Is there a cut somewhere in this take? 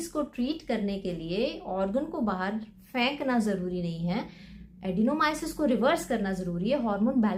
no; 0 cuts

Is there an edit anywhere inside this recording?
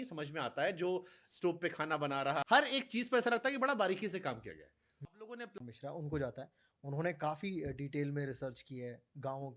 yes; 2 cuts; at 2.4 s, 5.6 s

